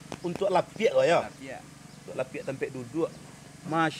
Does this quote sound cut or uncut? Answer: uncut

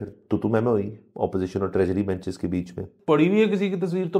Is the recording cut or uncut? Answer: cut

